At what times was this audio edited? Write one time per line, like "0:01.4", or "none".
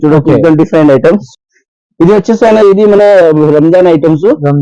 0:01.4